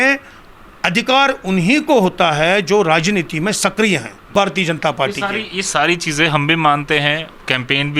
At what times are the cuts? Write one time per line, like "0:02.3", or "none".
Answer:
0:04.2